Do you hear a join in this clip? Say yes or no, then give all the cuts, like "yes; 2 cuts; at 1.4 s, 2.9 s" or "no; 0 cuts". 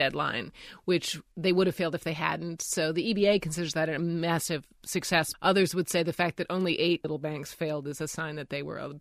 yes; 2 cuts; at 5.3 s, 7.1 s